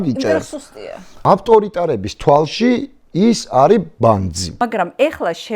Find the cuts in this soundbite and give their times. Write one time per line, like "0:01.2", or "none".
0:01.2
0:04.4